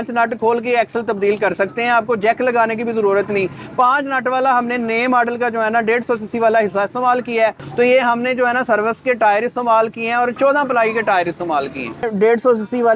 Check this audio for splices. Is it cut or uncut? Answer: cut